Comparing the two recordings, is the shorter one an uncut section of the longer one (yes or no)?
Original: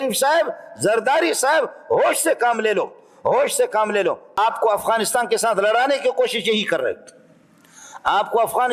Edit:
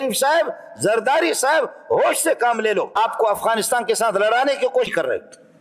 no